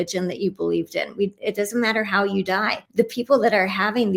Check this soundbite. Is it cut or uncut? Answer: cut